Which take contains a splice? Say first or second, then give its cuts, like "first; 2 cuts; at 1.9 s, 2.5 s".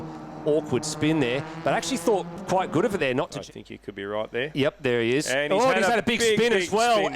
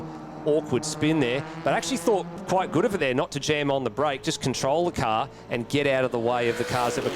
first; 1 cut; at 3.4 s